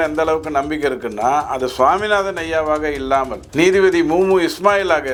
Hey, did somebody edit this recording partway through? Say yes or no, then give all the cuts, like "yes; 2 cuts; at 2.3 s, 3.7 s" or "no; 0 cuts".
no; 0 cuts